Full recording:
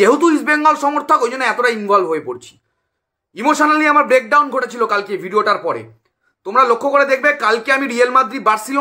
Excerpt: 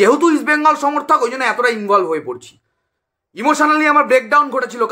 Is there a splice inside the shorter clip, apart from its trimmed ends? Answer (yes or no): no